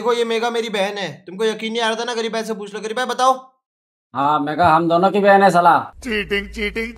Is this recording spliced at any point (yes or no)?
no